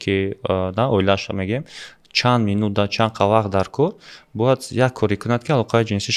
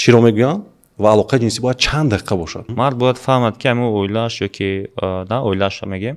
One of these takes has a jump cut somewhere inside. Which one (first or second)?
second